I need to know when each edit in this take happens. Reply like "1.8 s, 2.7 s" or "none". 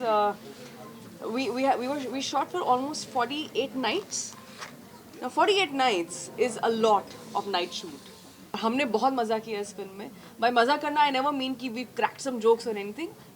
8.6 s

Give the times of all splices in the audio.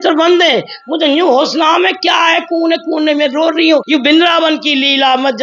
3.8 s

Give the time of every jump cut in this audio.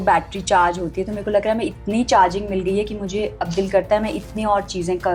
none

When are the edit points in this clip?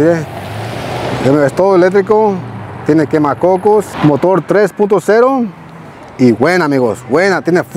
3.9 s

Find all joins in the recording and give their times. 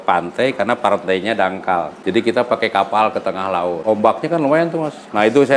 1.9 s, 3.8 s

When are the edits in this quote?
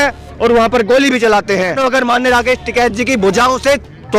1.8 s

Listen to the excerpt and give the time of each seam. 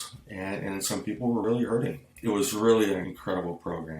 2.1 s

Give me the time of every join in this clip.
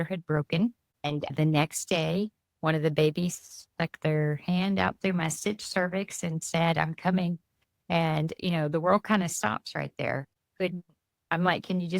1.0 s, 10.3 s

